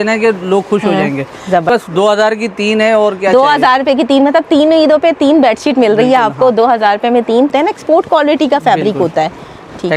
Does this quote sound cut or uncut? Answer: cut